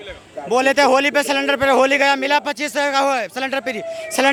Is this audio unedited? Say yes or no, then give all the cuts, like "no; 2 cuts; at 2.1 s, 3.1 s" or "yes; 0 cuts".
yes; 0 cuts